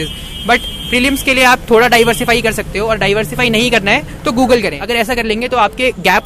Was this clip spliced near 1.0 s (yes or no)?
no